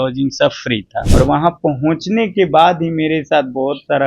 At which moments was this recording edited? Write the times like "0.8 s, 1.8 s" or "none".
1.0 s